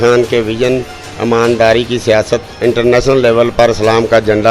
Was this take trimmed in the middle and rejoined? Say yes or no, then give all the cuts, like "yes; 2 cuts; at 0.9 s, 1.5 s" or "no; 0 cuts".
no; 0 cuts